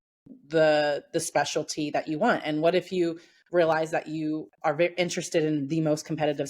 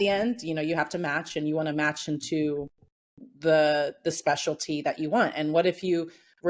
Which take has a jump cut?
first; 1 cut; at 4.5 s

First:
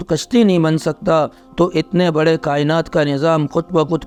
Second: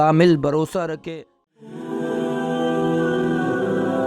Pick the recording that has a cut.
second; 1 cut; at 1.0 s

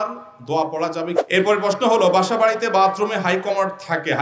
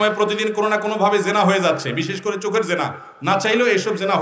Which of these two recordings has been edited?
first; 1 cut; at 1.2 s

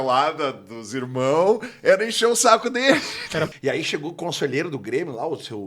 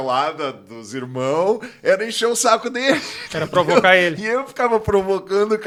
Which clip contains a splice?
first; 1 cut; at 3.5 s

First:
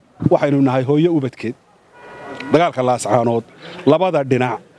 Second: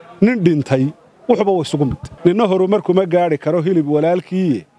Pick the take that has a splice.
second; 1 cut; at 2.0 s

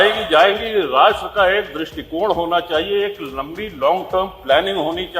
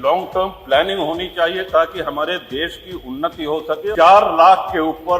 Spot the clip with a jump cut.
second; 1 cut; at 3.9 s

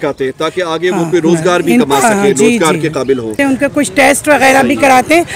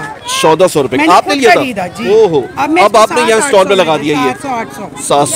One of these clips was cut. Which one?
first; 1 cut; at 3.4 s

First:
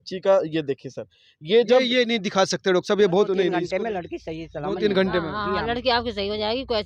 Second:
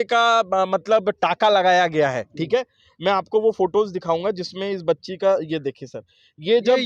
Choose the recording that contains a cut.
first; 1 cut; at 3.6 s

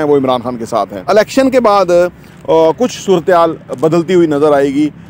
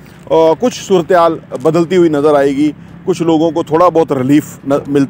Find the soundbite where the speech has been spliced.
first; 1 cut; at 1.0 s

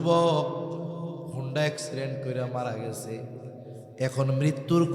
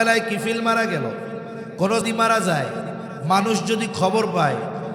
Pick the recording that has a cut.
second; 1 cut; at 2.1 s

